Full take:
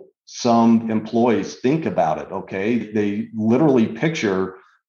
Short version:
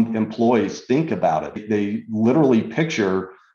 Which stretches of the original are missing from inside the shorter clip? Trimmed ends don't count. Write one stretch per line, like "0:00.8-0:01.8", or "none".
0:02.4-0:02.9